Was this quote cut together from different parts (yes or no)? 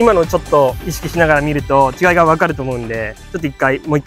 no